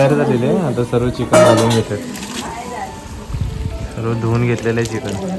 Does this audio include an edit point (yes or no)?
no